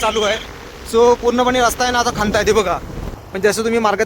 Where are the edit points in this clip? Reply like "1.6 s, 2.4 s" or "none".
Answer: 3.1 s

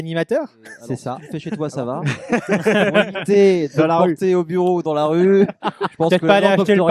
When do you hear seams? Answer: 1.3 s

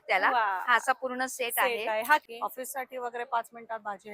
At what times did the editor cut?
2.2 s

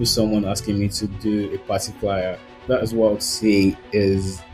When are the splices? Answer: 2.5 s

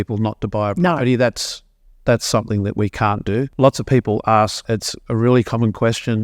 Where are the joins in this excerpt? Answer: 4.6 s

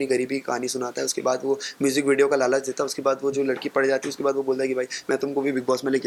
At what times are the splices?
none

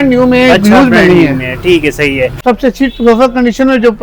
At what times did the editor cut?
2.4 s

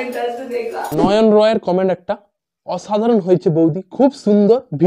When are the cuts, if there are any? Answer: none

